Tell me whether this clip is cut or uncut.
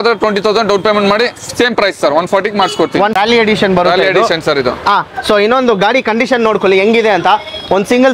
cut